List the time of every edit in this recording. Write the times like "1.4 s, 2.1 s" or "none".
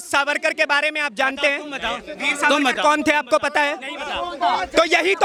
none